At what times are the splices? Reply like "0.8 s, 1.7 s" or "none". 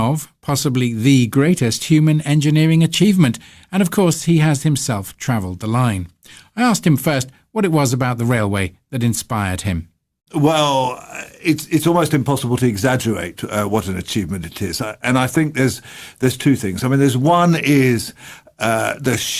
1.3 s